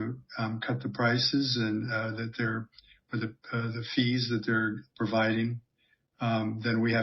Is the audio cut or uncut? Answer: uncut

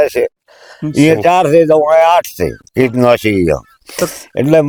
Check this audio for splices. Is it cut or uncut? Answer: uncut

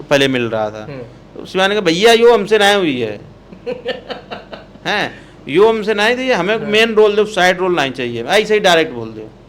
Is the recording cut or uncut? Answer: uncut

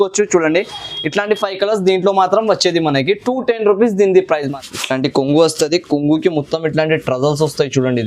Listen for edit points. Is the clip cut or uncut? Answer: cut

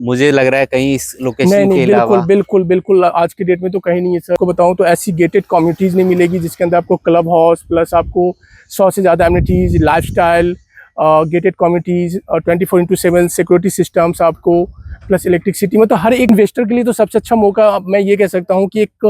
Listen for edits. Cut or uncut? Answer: cut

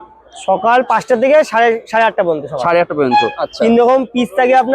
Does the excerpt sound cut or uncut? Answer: cut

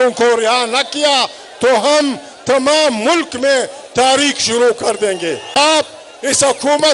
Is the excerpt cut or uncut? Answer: uncut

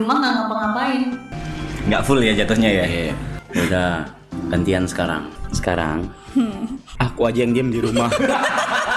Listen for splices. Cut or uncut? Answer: cut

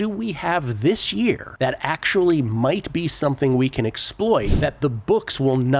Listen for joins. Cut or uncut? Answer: cut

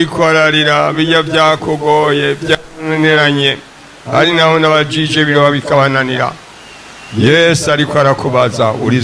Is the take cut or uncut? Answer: uncut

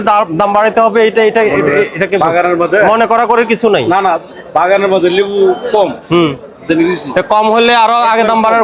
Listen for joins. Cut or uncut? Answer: uncut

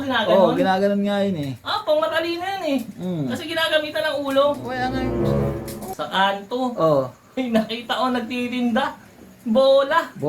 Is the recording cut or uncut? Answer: cut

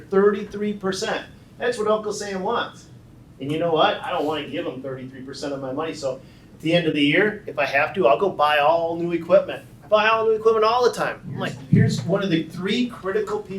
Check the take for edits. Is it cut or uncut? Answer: cut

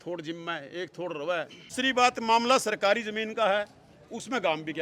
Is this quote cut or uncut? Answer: cut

